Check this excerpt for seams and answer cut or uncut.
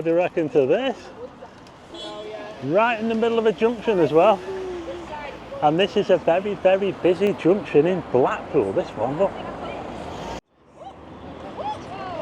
cut